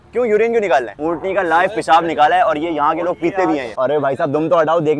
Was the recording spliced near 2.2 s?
no; 2 cuts; at 0.9 s, 3.7 s

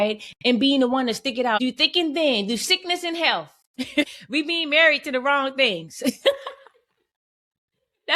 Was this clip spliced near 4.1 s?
yes; 2 cuts; at 1.6 s, 4.1 s

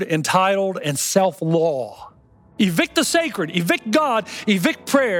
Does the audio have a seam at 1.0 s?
no; 1 cut; at 2.4 s

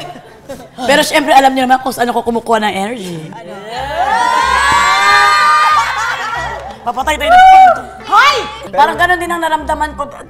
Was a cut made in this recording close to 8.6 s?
yes; 1 cut; at 8.6 s

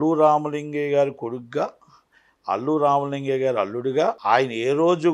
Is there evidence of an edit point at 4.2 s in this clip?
yes; 1 cut; at 4.2 s

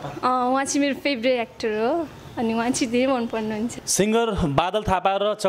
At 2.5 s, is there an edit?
no; 1 cut; at 3.8 s

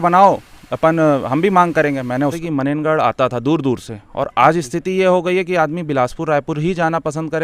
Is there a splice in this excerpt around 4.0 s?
no; 1 cut; at 2.4 s

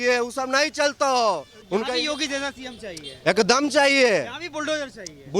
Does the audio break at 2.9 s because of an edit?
no; 1 cut; at 1.5 s

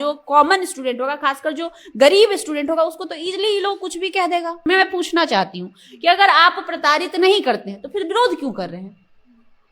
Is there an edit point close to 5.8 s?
no; 1 cut; at 4.6 s

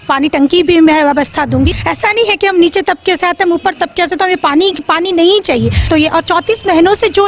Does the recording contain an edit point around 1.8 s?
yes; 2 cuts; at 1.8 s, 5.9 s

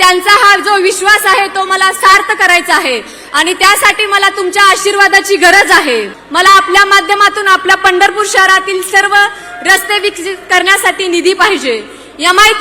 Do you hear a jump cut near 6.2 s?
yes; 1 cut; at 6.2 s

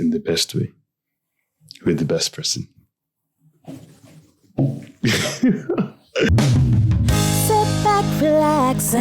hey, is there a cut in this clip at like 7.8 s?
no; 1 cut; at 6.3 s

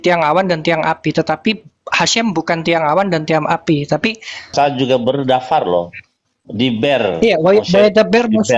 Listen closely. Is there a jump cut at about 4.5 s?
yes; 1 cut; at 4.5 s

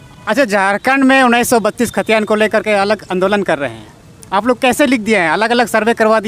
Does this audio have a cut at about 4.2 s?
no; 0 cuts

